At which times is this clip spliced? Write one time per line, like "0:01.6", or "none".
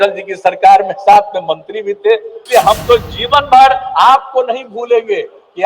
0:02.3